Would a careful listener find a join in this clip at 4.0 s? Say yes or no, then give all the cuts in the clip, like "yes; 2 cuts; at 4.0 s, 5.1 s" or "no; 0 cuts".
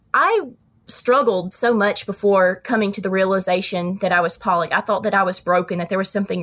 no; 0 cuts